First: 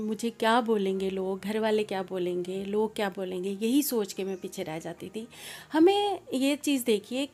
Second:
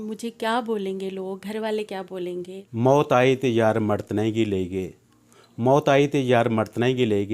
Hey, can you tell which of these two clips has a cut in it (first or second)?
second